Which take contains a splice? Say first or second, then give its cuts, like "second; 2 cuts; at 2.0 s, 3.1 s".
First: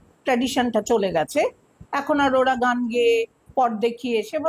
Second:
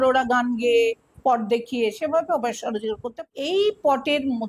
second; 1 cut; at 3.2 s